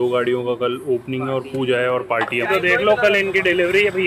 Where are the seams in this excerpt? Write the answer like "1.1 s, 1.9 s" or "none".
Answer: 2.5 s